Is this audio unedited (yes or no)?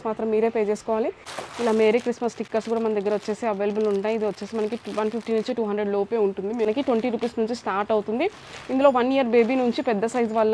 no